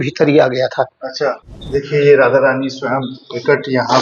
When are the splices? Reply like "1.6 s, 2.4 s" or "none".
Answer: 1.4 s